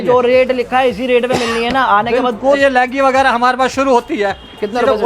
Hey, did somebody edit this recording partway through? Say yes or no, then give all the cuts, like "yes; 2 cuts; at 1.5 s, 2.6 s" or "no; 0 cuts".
yes; 1 cut; at 2.6 s